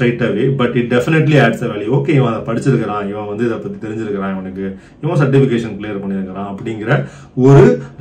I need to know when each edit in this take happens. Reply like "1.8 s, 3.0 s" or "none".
none